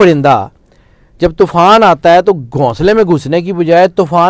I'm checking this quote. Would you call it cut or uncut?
uncut